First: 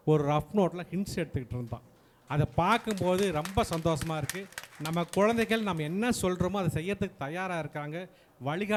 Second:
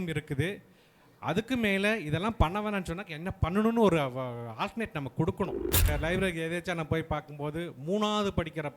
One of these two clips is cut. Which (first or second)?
second